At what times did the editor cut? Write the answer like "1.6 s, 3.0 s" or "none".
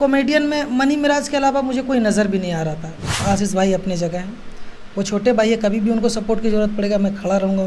3.2 s

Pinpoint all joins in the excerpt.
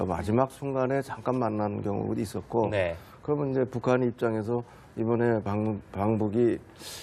5.7 s

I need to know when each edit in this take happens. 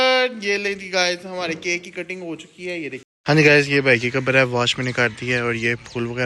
3.1 s

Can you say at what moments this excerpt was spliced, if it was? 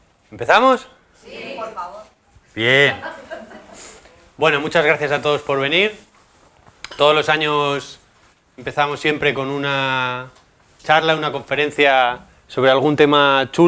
9.6 s

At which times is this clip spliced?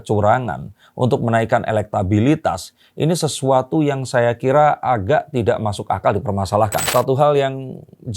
6.9 s

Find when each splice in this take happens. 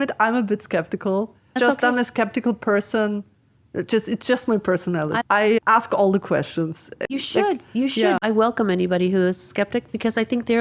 1.5 s, 5.2 s, 7.0 s, 8.2 s

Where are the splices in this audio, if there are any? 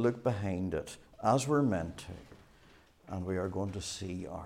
none

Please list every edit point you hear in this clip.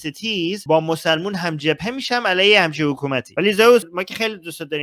3.3 s, 3.9 s

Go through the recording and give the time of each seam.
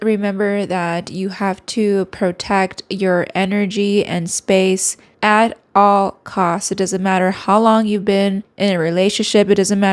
none

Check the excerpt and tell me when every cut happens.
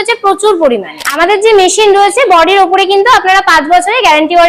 1.0 s

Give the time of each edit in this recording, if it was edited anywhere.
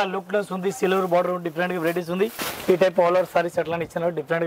2.5 s

